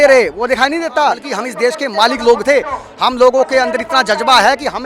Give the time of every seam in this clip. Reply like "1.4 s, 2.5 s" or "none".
1.3 s